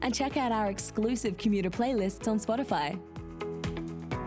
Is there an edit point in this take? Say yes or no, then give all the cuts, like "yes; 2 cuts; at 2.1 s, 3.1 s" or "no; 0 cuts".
yes; 1 cut; at 3.1 s